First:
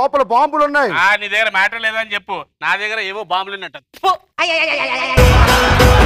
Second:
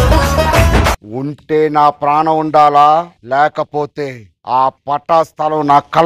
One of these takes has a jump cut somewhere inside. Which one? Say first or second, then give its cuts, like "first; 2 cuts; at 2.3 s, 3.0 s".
second; 1 cut; at 1.0 s